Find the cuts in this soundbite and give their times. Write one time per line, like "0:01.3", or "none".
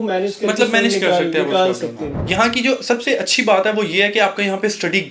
0:02.1